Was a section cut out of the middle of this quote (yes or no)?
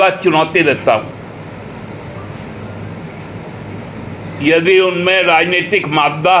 no